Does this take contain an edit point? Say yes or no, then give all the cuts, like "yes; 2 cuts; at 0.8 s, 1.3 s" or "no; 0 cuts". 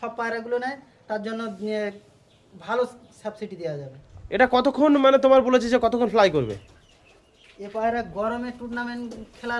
yes; 1 cut; at 4.0 s